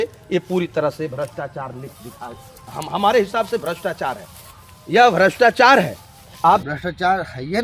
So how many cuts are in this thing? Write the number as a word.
one